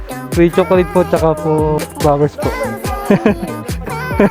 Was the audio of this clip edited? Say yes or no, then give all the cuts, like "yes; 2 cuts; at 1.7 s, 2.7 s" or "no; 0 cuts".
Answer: yes; 1 cut; at 1.8 s